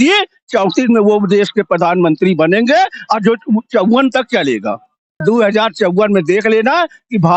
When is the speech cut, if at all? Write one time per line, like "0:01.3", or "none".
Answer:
0:05.2